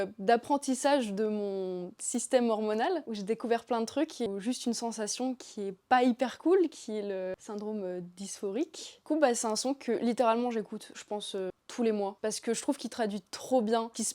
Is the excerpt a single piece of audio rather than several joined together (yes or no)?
yes